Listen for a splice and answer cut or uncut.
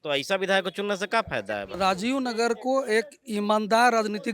cut